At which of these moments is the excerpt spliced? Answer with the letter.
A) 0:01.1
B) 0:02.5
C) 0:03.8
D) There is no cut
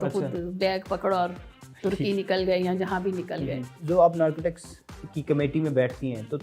C